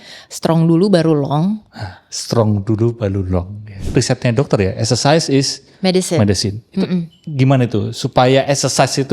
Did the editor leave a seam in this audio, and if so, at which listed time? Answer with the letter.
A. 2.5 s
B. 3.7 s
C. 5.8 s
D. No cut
B